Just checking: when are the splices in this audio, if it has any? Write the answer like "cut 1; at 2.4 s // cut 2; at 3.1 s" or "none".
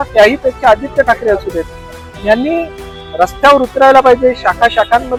none